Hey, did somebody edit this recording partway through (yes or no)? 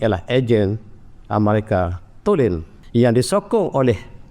yes